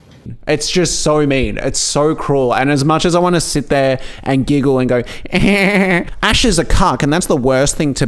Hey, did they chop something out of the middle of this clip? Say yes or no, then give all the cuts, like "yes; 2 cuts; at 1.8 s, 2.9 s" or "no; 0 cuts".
no; 0 cuts